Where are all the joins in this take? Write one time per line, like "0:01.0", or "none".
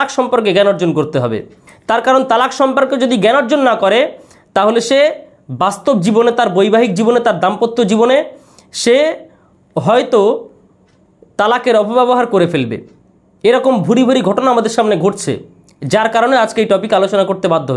none